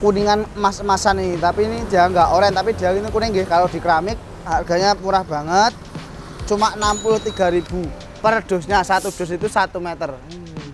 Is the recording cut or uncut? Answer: cut